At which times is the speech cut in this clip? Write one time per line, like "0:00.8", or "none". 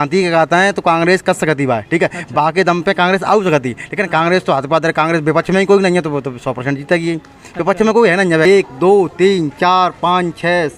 0:08.5